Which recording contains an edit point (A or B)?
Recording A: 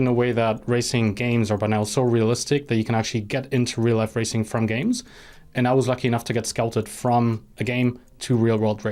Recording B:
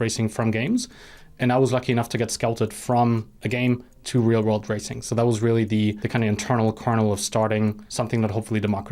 B